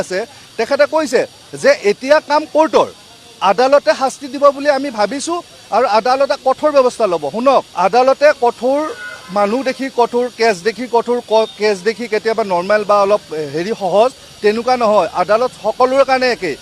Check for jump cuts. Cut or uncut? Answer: cut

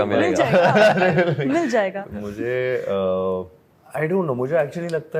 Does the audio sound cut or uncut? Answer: uncut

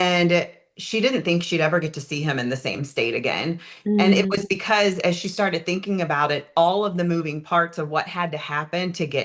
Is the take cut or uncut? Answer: uncut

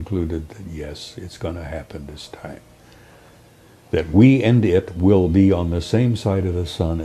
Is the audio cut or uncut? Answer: uncut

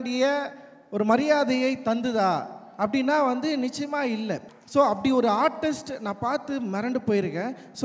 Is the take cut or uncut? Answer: cut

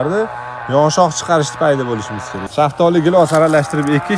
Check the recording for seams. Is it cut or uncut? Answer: cut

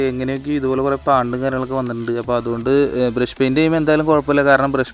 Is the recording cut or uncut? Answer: uncut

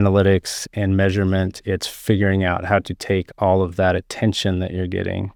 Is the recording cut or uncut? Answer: uncut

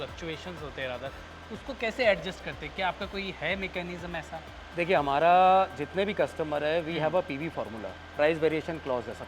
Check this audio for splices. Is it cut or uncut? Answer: uncut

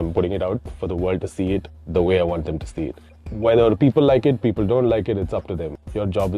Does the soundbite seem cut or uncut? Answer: uncut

